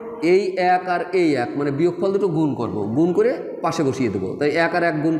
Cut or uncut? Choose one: uncut